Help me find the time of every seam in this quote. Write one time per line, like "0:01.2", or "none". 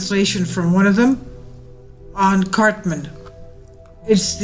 0:01.1